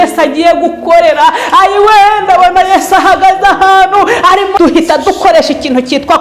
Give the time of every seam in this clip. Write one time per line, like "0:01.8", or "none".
0:04.5